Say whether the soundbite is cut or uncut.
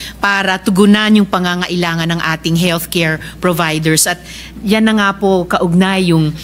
uncut